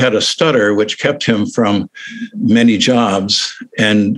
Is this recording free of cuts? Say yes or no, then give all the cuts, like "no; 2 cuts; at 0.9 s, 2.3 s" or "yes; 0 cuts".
no; 1 cut; at 2.2 s